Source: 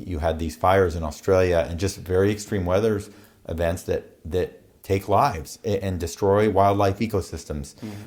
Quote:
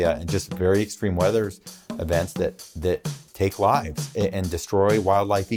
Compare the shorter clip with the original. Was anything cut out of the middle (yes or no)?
no